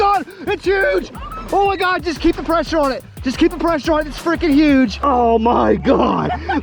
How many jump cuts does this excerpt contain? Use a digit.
1